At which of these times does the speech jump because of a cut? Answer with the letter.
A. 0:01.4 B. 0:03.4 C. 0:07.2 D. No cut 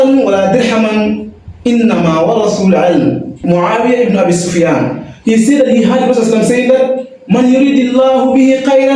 B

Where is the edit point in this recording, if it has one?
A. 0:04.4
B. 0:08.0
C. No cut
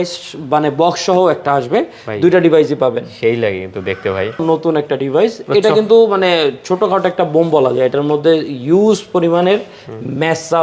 A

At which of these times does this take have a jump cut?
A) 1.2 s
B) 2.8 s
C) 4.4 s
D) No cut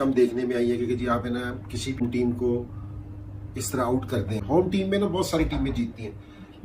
C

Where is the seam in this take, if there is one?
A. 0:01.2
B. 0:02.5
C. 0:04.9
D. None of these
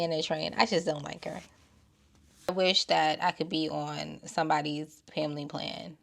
B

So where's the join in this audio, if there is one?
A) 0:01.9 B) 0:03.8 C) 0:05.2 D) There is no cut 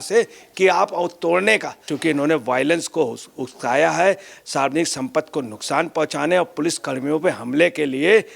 A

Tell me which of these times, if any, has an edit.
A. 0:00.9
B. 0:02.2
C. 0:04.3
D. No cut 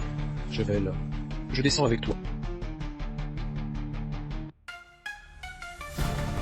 B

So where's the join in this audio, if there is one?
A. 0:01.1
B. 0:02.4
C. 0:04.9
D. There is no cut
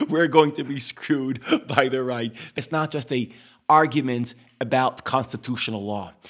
B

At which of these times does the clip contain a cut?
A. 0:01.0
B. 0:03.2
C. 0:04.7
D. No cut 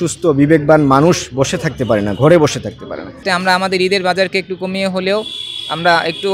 B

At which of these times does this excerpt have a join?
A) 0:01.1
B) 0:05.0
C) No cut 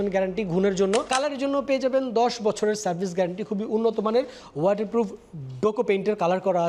A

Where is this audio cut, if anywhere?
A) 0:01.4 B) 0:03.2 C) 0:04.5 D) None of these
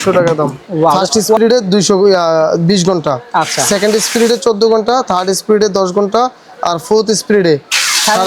A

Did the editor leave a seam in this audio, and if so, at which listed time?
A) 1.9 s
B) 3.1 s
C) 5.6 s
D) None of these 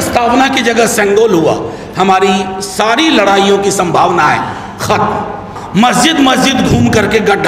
C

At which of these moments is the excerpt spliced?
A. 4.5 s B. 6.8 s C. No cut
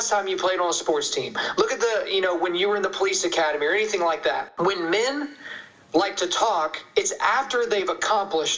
A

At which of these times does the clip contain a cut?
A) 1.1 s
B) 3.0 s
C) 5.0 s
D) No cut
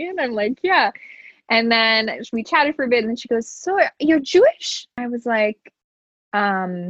C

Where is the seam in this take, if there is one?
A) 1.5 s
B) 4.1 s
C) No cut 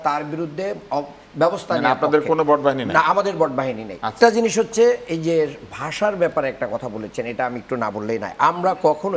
B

